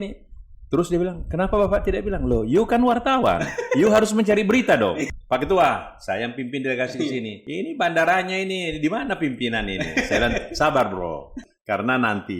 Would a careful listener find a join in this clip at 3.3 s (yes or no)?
no